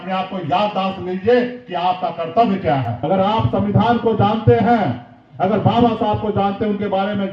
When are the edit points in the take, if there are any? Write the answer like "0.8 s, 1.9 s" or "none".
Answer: 2.9 s